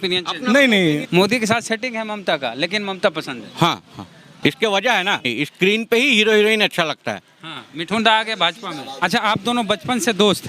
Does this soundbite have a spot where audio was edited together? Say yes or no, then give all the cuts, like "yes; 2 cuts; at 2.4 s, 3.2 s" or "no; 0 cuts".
yes; 3 cuts; at 1.0 s, 5.3 s, 9.0 s